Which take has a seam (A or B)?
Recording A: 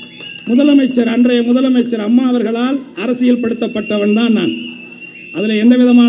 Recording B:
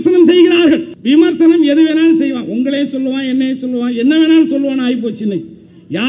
B